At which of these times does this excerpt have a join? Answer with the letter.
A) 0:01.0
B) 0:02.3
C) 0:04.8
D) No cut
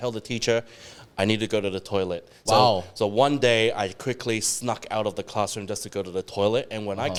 D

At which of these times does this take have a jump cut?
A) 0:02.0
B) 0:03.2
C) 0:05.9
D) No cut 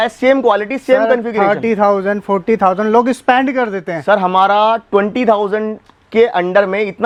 D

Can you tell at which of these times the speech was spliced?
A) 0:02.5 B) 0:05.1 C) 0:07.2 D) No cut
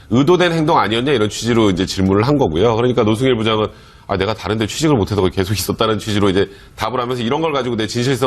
B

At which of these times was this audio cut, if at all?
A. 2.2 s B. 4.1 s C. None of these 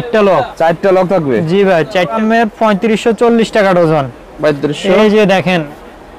A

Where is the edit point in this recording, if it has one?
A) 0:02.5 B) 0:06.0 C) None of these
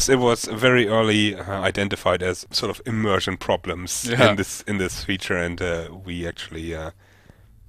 A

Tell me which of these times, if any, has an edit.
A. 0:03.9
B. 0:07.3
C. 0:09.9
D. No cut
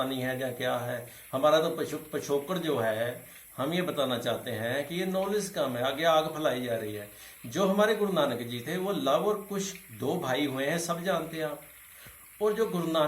D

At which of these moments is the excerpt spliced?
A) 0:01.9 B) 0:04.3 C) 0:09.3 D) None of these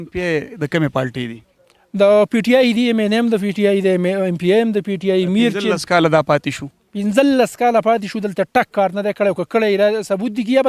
D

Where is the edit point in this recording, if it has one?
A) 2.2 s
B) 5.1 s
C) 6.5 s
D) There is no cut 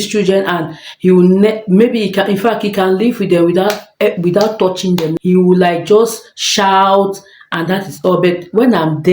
B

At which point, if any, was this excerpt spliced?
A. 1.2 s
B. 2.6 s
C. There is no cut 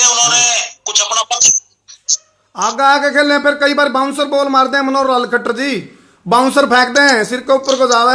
C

